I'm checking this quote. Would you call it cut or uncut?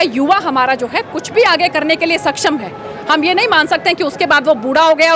uncut